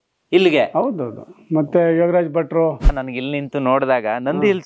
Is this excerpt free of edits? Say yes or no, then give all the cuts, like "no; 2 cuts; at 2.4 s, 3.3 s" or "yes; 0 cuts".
no; 1 cut; at 3.0 s